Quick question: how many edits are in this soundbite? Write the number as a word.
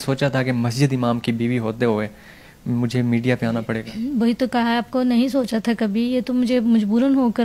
zero